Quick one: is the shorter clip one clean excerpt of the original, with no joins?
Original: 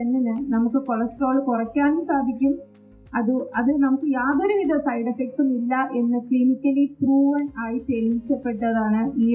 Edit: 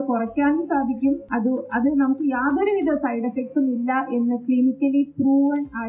no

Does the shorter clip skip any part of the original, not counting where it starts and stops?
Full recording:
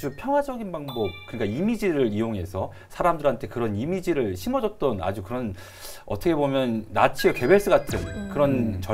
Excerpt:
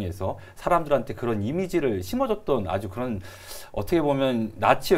no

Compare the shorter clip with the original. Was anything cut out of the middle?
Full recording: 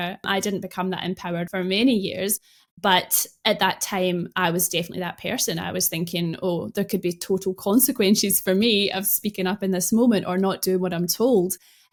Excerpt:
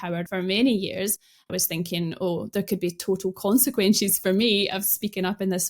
yes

